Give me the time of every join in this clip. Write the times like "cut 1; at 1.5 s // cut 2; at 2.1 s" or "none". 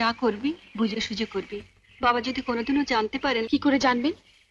none